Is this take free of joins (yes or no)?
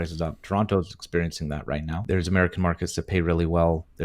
no